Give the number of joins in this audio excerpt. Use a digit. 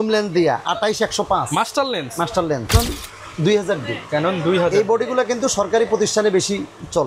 1